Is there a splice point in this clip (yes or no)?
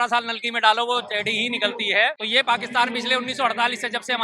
yes